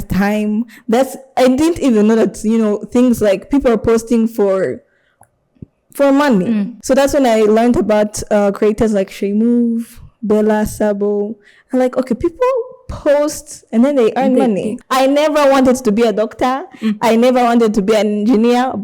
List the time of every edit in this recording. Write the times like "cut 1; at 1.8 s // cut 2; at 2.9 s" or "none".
cut 1; at 6.7 s // cut 2; at 14.8 s